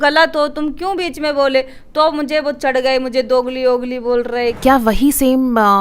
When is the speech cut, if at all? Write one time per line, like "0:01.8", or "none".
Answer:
0:04.6